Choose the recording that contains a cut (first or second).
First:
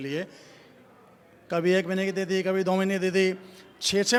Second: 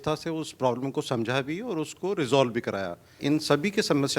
second